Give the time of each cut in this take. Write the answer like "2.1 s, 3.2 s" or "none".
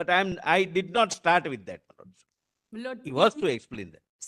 none